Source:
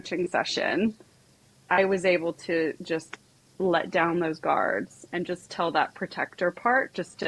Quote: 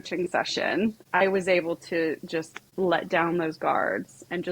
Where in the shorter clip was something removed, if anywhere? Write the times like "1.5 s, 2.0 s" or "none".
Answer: 1.0 s, 2.6 s